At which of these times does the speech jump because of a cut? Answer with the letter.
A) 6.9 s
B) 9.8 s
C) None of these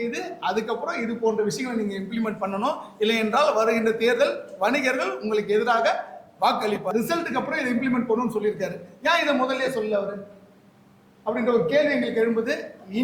A